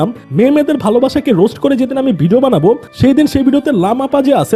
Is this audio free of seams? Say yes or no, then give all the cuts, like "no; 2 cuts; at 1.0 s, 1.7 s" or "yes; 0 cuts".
yes; 0 cuts